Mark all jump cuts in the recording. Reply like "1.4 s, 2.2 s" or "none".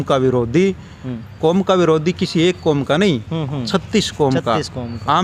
none

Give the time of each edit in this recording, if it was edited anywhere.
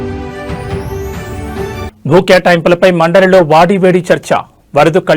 1.9 s

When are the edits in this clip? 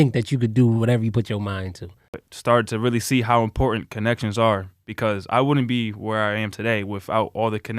2.2 s

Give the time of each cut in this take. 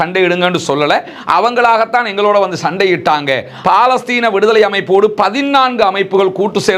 3.5 s

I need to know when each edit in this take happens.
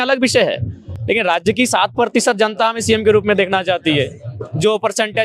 none

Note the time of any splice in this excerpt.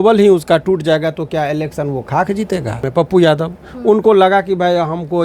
2.9 s

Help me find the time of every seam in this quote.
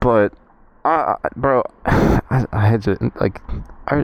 none

